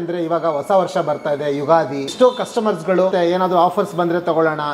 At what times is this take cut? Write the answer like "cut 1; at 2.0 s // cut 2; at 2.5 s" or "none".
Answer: cut 1; at 2.1 s // cut 2; at 3.1 s